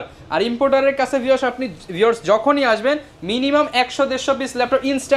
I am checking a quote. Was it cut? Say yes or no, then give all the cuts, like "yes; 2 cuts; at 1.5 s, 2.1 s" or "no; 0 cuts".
no; 0 cuts